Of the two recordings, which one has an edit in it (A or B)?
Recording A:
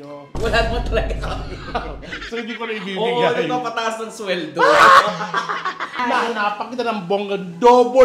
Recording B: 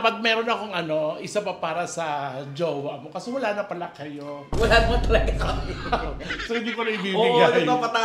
A